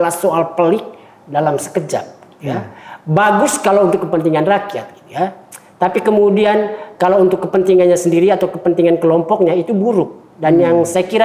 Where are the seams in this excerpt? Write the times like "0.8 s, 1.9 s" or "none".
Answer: none